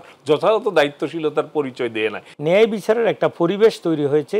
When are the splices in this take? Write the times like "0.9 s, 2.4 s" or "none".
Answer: 2.3 s